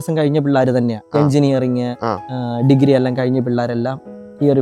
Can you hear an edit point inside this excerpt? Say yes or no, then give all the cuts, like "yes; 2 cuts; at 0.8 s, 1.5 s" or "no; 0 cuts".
no; 0 cuts